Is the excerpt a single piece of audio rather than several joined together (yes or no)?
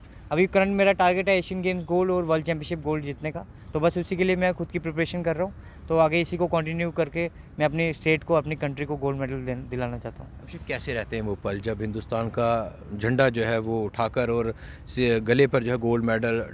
yes